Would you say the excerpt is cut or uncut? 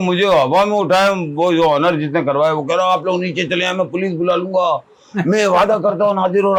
uncut